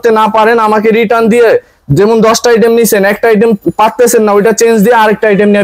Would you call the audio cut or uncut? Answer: uncut